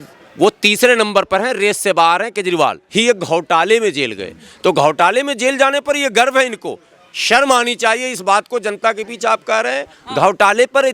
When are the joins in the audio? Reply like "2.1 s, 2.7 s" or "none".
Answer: 2.8 s